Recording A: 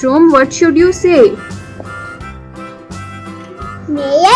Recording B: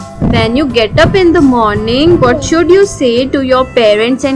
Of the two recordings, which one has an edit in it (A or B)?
A